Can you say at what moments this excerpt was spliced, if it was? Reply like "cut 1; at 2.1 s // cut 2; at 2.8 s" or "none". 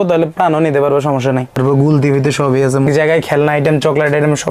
cut 1; at 1.5 s // cut 2; at 2.9 s